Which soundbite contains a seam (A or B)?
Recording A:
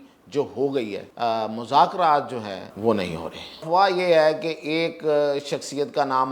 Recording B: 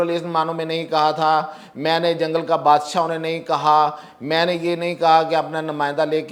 A